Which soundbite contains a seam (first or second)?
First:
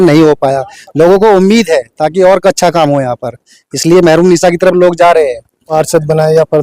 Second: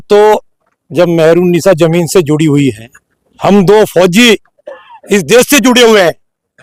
first